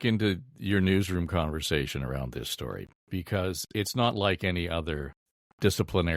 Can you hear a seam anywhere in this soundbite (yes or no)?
no